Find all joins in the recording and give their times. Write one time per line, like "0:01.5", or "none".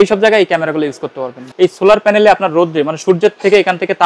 0:01.4